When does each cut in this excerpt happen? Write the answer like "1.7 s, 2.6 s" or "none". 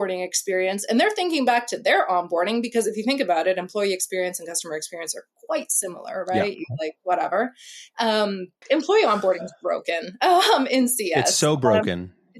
8.6 s

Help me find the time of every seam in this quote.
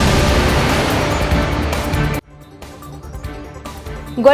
none

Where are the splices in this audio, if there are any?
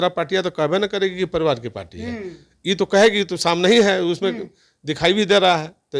none

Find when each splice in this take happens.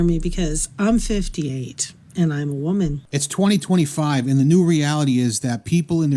3.1 s

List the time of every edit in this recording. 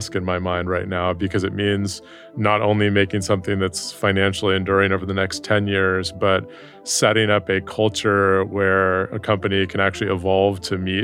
none

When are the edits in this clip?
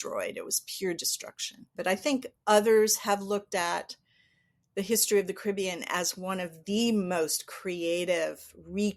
none

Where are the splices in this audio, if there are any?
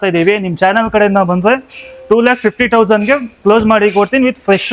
none

